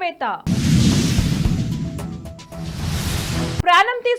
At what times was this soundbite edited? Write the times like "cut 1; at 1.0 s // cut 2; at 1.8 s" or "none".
none